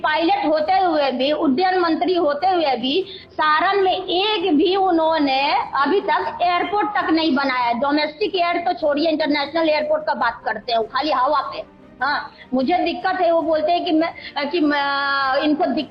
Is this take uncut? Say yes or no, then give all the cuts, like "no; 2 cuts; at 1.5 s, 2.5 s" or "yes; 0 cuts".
yes; 0 cuts